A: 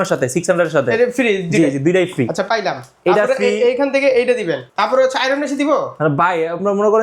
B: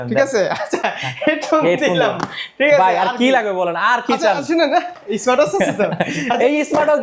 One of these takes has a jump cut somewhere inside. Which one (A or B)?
A